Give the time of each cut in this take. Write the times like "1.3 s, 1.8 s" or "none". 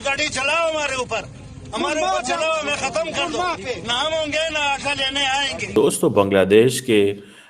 5.6 s